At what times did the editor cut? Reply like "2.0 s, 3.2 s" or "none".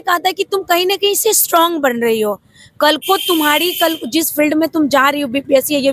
none